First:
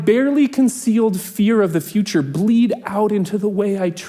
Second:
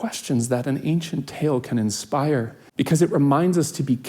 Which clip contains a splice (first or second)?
second